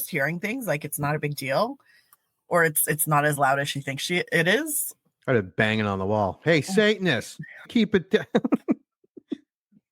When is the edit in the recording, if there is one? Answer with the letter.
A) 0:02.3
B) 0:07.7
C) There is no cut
B